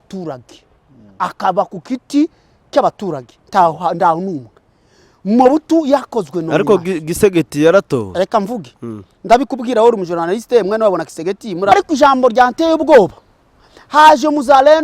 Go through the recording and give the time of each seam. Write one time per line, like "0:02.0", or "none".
0:11.7